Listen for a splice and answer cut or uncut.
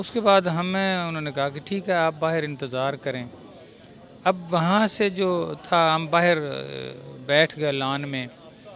uncut